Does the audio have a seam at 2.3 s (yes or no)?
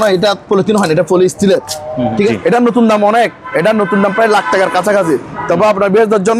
yes